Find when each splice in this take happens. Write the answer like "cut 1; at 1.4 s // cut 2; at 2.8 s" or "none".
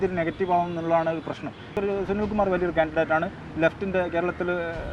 cut 1; at 1.8 s